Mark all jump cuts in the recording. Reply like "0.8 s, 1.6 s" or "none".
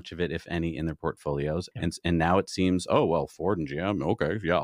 1.7 s